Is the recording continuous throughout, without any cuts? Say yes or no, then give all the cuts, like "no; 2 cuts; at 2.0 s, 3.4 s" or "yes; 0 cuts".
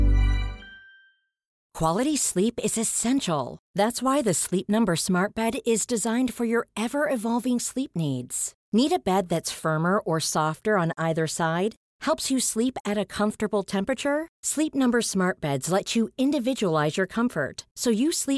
no; 1 cut; at 1.7 s